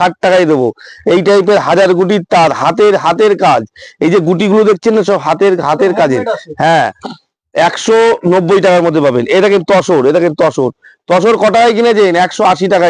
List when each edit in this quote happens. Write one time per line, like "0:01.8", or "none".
none